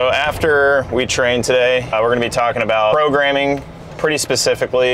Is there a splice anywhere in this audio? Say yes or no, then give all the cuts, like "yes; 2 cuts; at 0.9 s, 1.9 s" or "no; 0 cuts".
yes; 2 cuts; at 1.9 s, 2.9 s